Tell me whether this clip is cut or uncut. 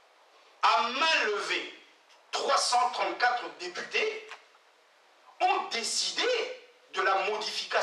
uncut